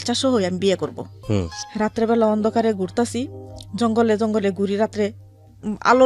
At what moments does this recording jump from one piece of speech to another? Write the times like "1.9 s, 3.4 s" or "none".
1.1 s